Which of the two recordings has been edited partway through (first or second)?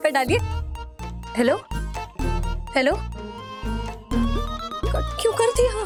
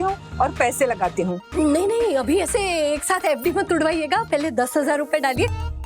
second